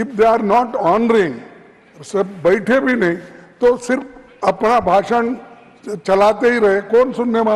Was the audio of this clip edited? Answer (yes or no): no